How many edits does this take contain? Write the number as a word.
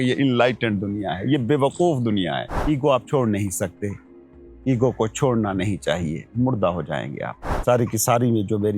two